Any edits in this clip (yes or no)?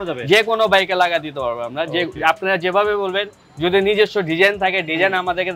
no